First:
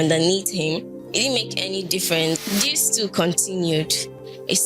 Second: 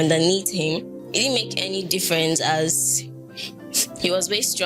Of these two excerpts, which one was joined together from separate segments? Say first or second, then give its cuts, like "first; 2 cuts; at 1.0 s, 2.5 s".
first; 1 cut; at 2.4 s